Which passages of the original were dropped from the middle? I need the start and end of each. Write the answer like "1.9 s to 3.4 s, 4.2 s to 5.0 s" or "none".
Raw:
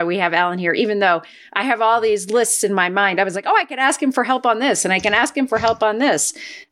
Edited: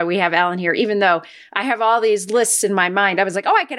none